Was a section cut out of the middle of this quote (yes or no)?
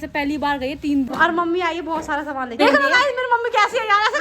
yes